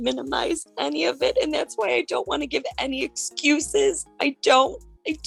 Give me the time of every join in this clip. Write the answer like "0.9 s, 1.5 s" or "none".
none